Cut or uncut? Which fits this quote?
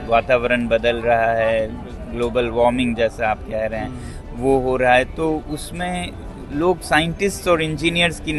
uncut